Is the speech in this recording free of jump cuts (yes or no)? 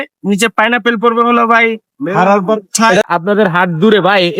no